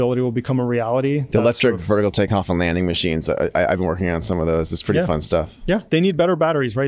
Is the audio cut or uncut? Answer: uncut